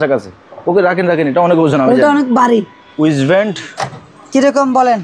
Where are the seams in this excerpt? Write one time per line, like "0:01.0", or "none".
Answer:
0:02.8